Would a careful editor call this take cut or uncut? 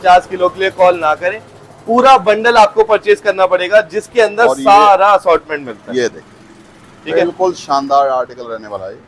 uncut